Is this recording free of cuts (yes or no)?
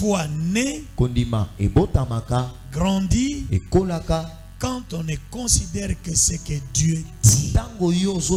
yes